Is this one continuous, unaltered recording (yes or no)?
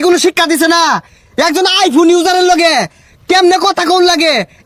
yes